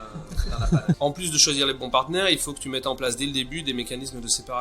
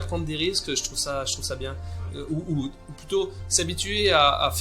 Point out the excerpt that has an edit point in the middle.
first; 1 cut; at 1.0 s

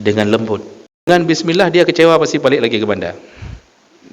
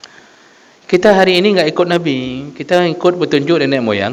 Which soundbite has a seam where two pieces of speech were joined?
first; 1 cut; at 1.1 s

